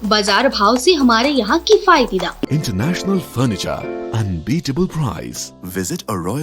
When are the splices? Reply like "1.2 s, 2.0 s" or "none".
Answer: 2.5 s